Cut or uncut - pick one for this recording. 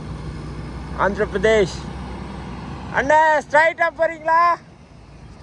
uncut